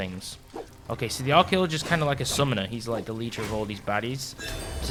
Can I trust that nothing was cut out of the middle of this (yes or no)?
yes